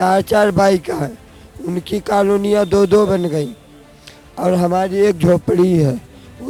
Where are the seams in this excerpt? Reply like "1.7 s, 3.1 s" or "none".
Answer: none